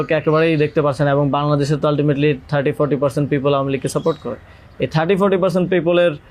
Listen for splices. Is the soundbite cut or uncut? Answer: uncut